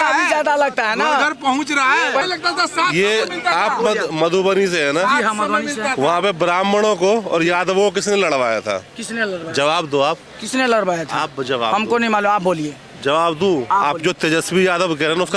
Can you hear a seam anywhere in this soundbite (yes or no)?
yes